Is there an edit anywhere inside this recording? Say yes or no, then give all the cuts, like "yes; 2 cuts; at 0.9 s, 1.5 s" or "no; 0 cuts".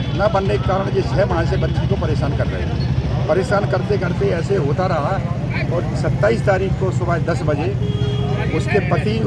no; 0 cuts